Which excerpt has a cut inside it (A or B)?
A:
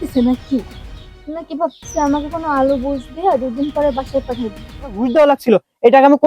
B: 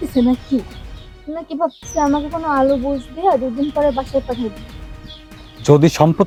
A